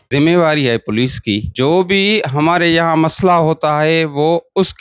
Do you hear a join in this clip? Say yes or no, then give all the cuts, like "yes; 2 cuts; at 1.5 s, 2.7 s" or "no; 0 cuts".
yes; 1 cut; at 1.5 s